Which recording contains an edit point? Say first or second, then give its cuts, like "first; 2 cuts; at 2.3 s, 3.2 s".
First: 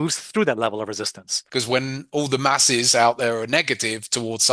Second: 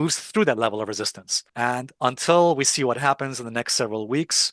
first; 1 cut; at 1.4 s